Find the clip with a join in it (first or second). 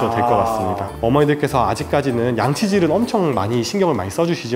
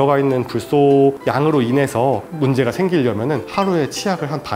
first